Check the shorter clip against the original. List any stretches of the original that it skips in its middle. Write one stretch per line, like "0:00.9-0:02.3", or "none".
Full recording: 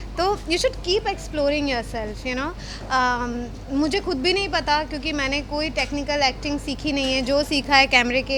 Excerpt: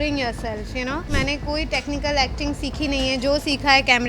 0:02.6-0:05.1